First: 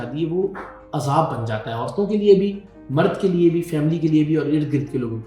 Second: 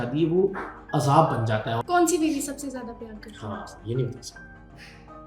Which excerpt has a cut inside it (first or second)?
second